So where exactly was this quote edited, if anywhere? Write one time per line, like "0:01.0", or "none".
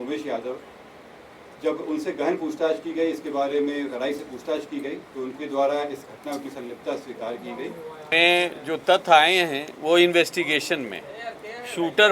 0:08.1